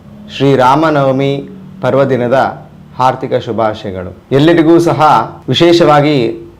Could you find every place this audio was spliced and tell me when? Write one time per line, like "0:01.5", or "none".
0:04.1
0:05.4